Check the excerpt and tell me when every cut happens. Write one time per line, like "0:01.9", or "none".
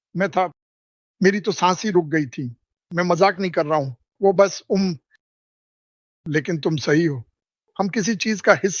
none